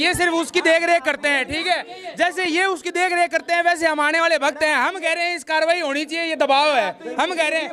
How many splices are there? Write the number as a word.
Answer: zero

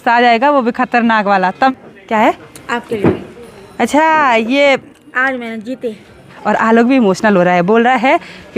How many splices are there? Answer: two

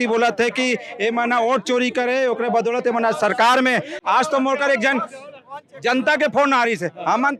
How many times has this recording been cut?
zero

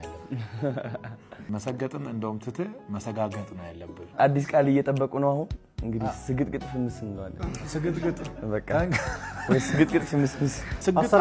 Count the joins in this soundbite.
zero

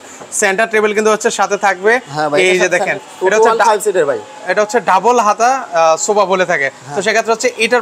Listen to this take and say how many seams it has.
zero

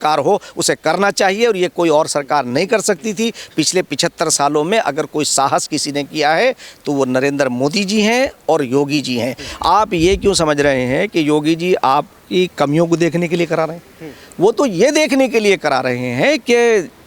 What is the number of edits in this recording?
one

